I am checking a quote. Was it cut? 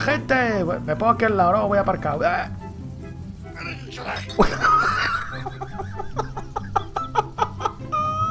no; 0 cuts

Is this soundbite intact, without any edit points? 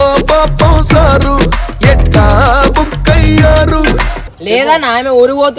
no; 1 cut; at 4.2 s

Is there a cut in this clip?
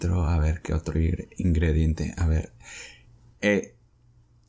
no; 0 cuts

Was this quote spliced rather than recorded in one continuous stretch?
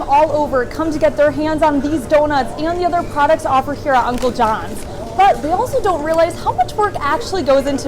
no; 0 cuts

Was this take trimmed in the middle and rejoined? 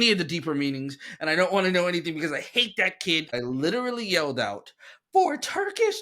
yes; 1 cut; at 3.3 s

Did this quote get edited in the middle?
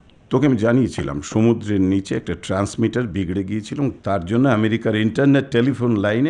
no; 0 cuts

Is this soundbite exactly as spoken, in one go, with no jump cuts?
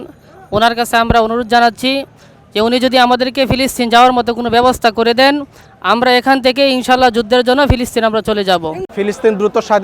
no; 1 cut; at 8.8 s

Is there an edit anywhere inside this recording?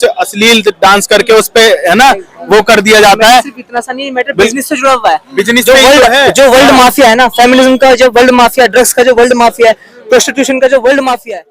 no; 0 cuts

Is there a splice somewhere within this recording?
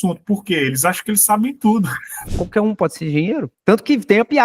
yes; 1 cut; at 2.0 s

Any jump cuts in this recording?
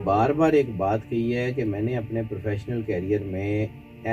no; 0 cuts

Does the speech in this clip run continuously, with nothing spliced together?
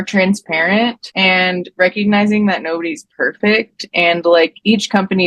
no; 1 cut; at 1.1 s

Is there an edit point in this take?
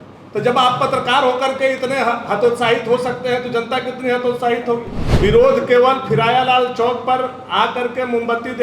yes; 1 cut; at 5.0 s

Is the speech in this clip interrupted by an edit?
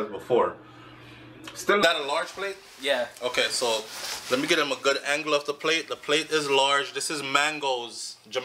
yes; 1 cut; at 1.8 s

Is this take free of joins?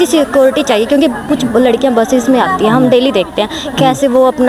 yes; 0 cuts

